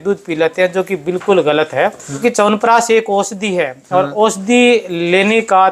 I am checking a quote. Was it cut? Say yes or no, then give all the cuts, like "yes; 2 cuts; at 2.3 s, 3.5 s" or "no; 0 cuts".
yes; 1 cut; at 2.2 s